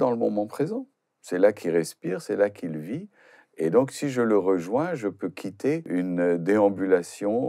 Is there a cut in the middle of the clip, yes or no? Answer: yes